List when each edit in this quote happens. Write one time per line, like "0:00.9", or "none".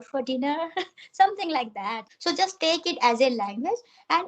0:02.0